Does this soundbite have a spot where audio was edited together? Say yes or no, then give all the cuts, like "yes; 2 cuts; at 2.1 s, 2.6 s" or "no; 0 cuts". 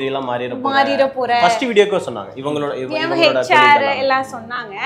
no; 0 cuts